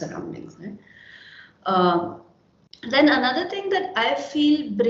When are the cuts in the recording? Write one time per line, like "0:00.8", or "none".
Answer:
none